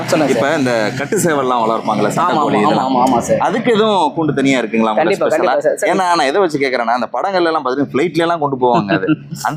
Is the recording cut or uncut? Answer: uncut